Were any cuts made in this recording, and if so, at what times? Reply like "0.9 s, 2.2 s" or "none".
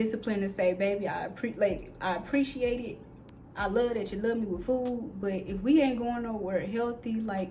none